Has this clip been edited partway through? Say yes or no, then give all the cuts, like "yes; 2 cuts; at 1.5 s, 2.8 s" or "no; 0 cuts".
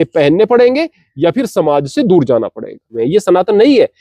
yes; 1 cut; at 3.0 s